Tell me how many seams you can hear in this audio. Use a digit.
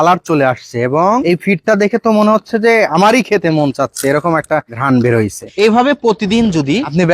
1